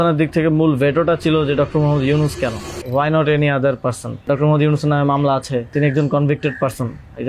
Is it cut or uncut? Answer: cut